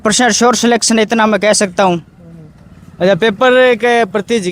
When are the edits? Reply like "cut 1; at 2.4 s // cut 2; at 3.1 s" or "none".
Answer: none